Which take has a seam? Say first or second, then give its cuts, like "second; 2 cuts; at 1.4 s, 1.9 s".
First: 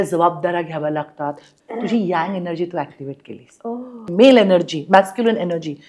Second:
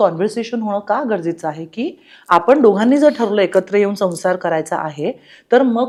first; 2 cuts; at 1.5 s, 4.1 s